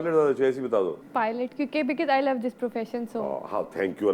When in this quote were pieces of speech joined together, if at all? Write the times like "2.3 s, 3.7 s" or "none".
1.0 s